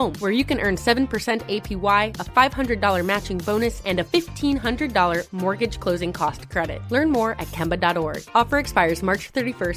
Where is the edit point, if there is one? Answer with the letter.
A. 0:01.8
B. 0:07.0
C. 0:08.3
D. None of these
D